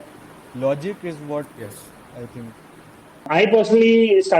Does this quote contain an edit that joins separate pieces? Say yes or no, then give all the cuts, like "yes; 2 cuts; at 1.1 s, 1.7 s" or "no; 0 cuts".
yes; 1 cut; at 3.3 s